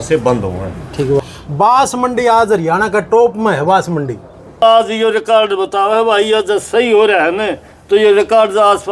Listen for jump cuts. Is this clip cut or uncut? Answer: cut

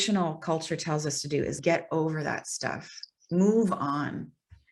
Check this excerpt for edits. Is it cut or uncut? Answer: cut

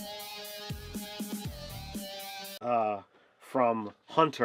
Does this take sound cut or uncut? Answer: uncut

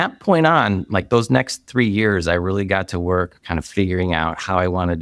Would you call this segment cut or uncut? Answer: uncut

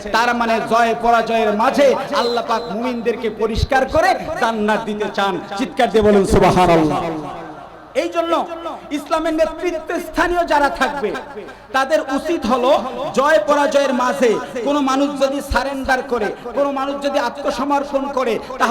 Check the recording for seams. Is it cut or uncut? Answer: uncut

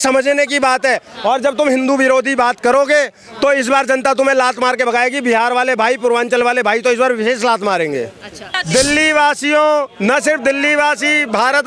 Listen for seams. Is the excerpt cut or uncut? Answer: cut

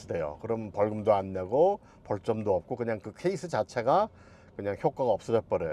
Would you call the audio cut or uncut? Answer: uncut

